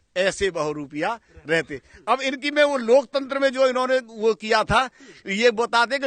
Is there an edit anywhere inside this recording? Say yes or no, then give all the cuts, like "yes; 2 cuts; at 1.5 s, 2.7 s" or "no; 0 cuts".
no; 0 cuts